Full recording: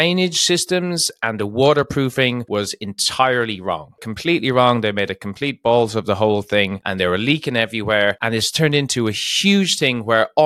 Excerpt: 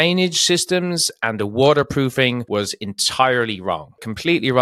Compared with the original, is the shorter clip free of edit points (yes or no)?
yes